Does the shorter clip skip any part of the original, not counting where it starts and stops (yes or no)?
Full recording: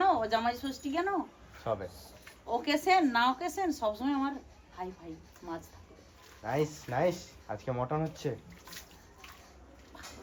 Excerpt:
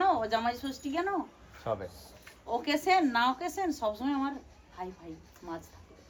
no